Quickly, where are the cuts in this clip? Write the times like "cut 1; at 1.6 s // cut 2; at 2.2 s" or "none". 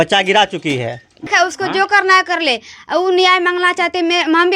cut 1; at 1.2 s